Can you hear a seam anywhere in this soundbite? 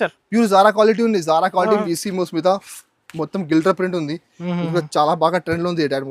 yes; 1 cut; at 1.8 s

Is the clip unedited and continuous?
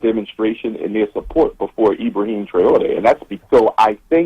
no; 1 cut; at 3.3 s

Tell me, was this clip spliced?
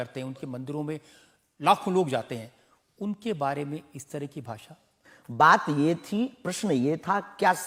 no; 0 cuts

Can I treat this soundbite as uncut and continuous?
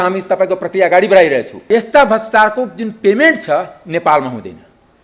no; 1 cut; at 1.7 s

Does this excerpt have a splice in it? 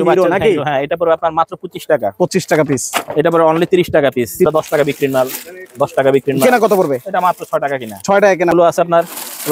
yes; 2 cuts; at 4.5 s, 8.5 s

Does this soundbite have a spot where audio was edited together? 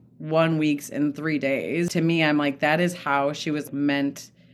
yes; 2 cuts; at 1.9 s, 3.7 s

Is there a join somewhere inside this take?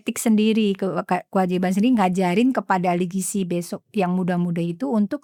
no; 0 cuts

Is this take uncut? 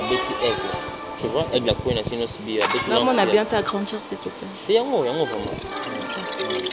yes; 0 cuts

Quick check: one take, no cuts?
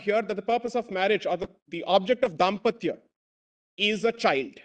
yes; 0 cuts

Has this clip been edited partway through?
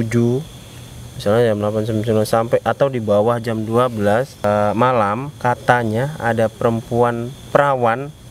yes; 3 cuts; at 4.4 s, 5.3 s, 7.3 s

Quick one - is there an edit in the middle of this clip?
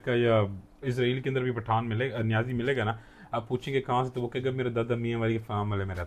no; 0 cuts

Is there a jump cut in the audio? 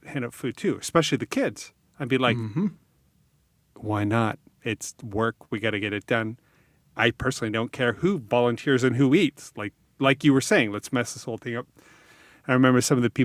no; 0 cuts

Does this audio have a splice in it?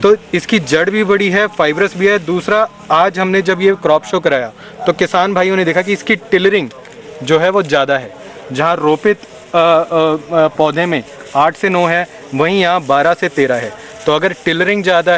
no; 0 cuts

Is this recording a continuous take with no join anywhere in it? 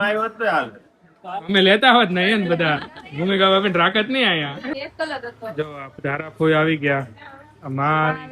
no; 1 cut; at 4.7 s

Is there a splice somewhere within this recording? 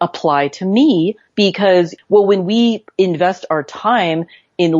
yes; 1 cut; at 2.0 s

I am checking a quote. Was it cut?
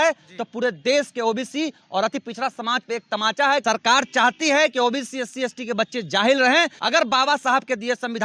yes; 2 cuts; at 3.6 s, 6.8 s

